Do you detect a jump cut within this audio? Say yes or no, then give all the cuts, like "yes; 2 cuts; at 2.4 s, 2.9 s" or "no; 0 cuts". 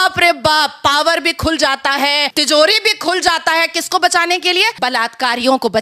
yes; 2 cuts; at 2.3 s, 4.7 s